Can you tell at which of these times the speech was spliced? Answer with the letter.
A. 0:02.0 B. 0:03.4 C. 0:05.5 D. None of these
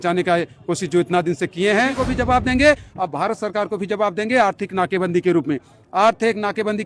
A